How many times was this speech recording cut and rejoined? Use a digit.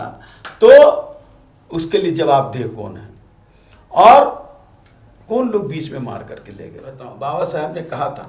1